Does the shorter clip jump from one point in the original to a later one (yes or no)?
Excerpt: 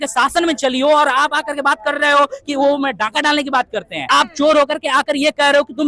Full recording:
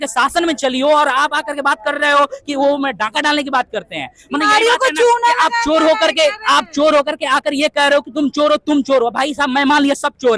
yes